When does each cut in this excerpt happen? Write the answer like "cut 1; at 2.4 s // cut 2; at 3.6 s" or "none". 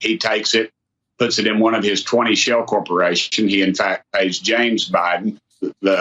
none